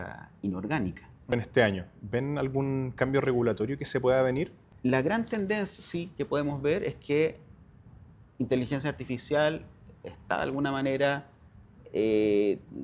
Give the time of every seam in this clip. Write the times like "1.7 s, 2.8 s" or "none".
1.3 s, 4.6 s